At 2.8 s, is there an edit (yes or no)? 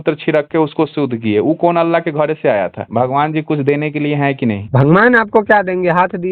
yes